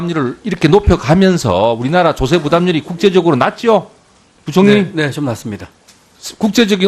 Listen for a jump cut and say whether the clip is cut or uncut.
uncut